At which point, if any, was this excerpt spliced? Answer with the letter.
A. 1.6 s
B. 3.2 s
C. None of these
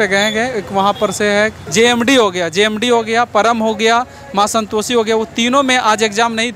A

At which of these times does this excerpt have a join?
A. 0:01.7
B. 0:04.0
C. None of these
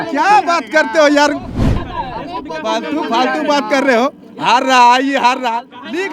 A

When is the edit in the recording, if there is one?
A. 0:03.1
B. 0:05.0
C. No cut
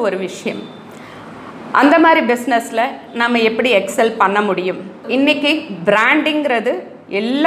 B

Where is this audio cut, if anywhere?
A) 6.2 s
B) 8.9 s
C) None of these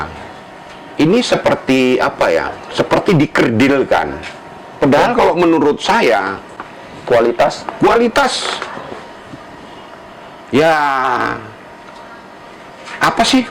C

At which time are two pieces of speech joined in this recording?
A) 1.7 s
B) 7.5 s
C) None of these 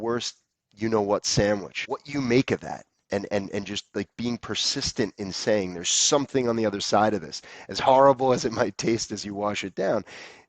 A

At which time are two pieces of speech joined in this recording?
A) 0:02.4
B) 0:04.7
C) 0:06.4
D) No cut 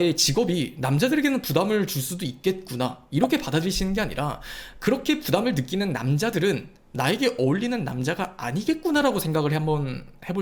D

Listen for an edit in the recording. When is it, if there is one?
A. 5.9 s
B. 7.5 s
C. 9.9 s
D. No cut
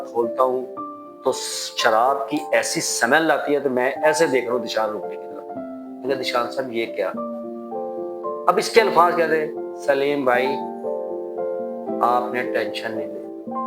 D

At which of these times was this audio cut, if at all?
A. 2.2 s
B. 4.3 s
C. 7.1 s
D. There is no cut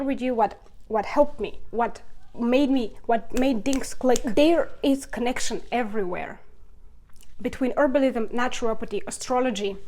B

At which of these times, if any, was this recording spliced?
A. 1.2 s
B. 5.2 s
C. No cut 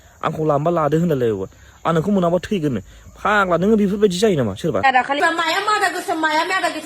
B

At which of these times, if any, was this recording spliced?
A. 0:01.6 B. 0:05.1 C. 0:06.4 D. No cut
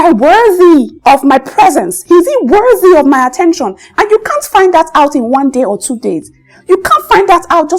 D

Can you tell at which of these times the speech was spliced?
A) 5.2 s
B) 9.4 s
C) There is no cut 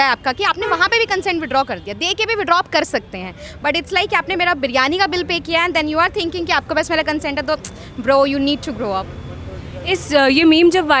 C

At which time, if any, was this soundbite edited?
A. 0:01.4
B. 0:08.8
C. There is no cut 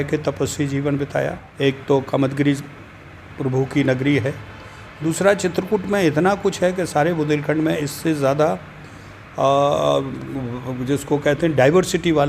A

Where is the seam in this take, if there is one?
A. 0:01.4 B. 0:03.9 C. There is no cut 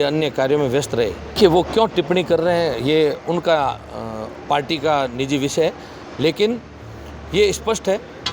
A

